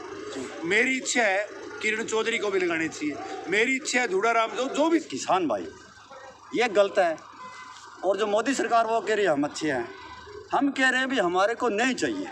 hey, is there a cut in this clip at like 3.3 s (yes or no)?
no